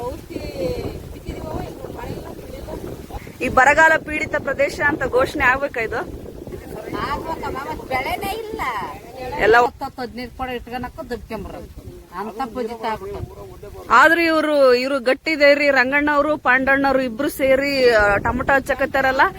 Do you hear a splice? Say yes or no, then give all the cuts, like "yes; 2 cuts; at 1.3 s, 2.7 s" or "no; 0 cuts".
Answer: yes; 3 cuts; at 3.2 s, 6.6 s, 9.7 s